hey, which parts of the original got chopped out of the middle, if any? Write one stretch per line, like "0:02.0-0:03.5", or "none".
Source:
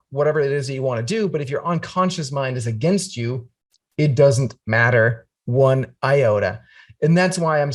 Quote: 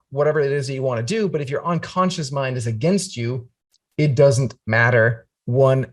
none